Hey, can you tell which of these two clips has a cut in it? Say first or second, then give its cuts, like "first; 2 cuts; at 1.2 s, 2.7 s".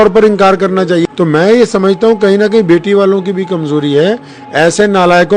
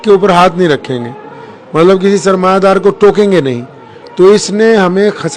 first; 1 cut; at 1.1 s